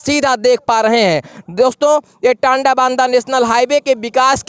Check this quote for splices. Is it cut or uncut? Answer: uncut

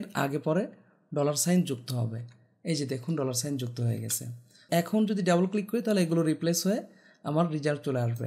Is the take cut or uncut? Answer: cut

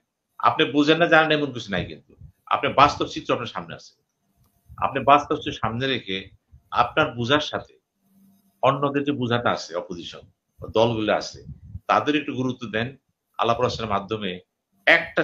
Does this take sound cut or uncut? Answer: uncut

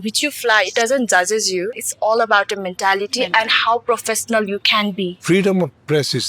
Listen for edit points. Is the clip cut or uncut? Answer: cut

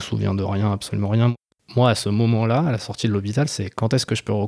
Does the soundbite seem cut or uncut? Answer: cut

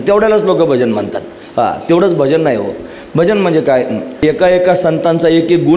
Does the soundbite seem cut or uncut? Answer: cut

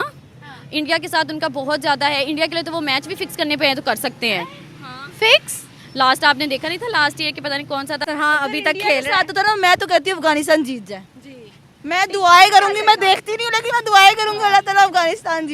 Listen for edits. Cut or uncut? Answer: cut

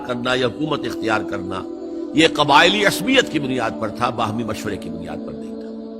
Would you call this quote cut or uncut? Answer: cut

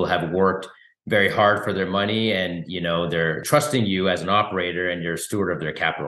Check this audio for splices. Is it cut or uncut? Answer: cut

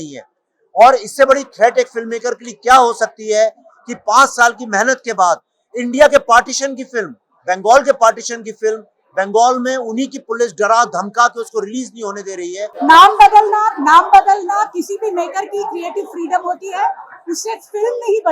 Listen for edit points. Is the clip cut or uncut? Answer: cut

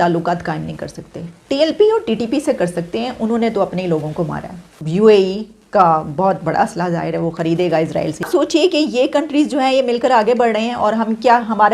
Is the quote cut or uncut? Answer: cut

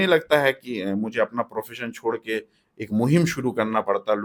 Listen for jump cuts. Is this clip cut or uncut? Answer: uncut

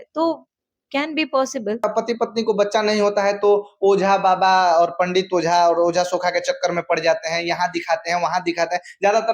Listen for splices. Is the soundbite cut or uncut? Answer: cut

